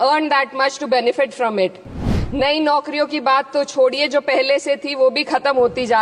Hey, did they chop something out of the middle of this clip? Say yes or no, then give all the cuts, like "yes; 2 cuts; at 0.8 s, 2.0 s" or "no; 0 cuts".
yes; 1 cut; at 2.1 s